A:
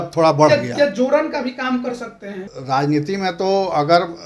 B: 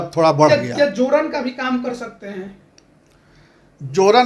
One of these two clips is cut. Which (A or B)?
A